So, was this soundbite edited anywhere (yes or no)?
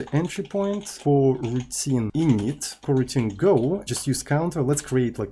yes